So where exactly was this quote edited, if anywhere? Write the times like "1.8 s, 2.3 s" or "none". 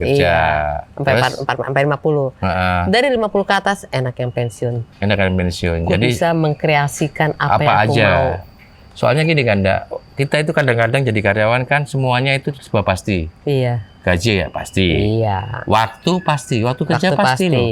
none